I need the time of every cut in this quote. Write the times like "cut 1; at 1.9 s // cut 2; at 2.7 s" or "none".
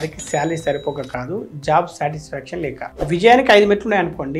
cut 1; at 2.8 s

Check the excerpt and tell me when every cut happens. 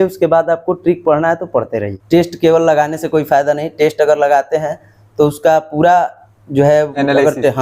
cut 1; at 1.9 s

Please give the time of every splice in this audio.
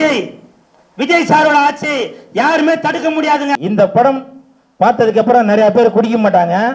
cut 1; at 3.6 s

